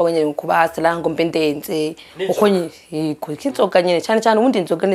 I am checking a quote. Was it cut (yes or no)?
no